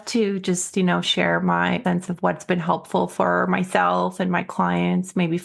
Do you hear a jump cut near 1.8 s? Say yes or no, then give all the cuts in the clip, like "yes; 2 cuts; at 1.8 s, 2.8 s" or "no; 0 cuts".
yes; 1 cut; at 1.8 s